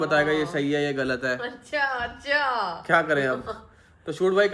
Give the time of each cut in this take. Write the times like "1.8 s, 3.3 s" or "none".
none